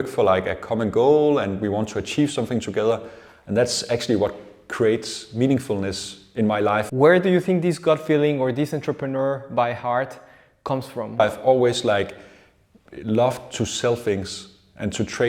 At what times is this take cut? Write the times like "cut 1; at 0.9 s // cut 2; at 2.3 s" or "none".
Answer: cut 1; at 6.9 s // cut 2; at 11.2 s